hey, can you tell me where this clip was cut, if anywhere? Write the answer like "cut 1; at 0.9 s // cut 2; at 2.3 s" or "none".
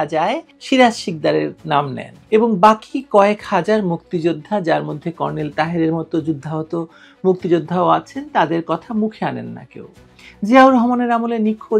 none